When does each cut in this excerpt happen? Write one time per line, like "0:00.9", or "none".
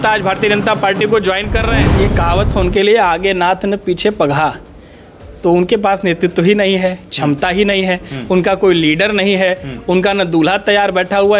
0:01.8